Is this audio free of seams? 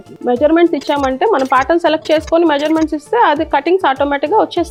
yes; 0 cuts

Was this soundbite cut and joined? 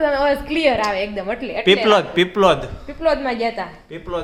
no; 0 cuts

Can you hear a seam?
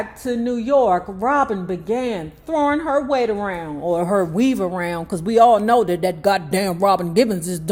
no; 0 cuts

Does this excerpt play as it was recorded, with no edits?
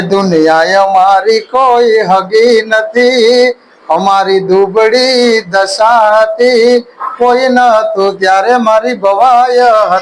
yes; 0 cuts

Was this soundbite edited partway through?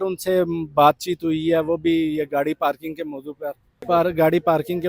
no; 0 cuts

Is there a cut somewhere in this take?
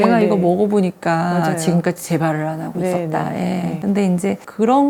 no; 0 cuts

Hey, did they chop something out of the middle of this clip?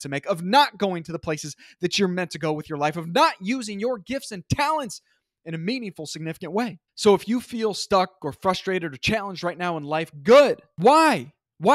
yes; 2 cuts; at 6.9 s, 10.7 s

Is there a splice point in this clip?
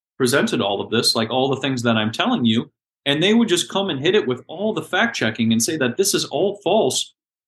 no; 0 cuts

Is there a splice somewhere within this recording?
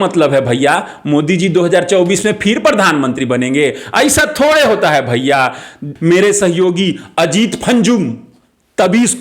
yes; 1 cut; at 5.9 s

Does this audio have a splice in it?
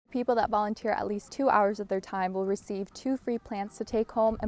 no; 0 cuts

